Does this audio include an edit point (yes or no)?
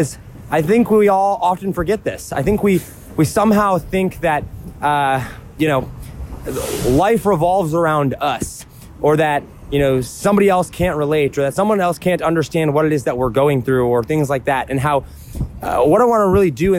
no